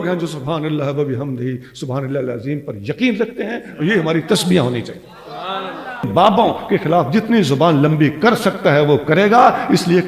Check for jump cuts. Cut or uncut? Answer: cut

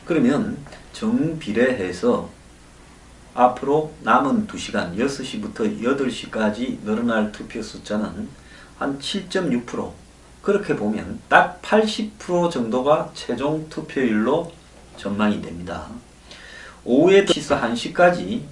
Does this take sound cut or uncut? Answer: cut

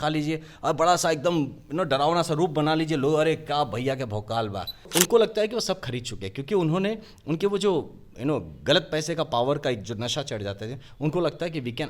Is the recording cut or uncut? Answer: cut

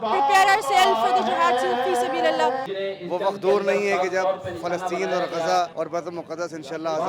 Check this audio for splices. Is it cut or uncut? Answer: cut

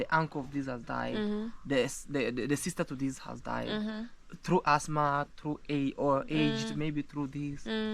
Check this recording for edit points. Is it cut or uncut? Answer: uncut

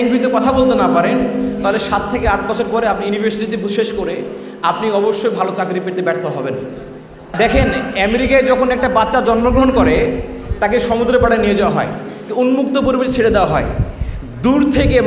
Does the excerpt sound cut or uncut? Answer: cut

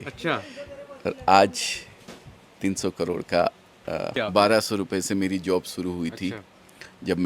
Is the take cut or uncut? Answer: cut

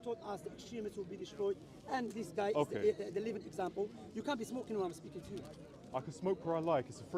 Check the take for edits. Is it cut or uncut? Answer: uncut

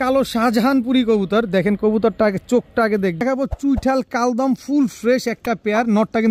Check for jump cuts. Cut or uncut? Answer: cut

